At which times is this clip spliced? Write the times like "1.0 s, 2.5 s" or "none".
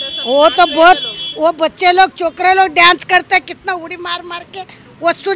none